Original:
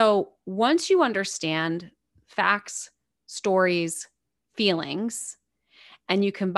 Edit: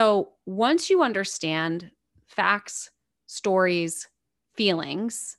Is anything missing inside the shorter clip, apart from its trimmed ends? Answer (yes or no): no